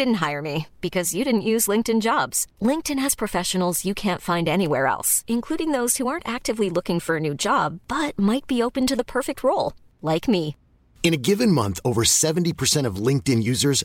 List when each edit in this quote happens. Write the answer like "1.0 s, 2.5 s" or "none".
none